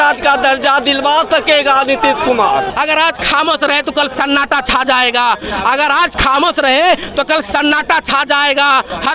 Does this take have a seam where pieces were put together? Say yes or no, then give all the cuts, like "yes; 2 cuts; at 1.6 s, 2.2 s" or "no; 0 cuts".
yes; 1 cut; at 2.7 s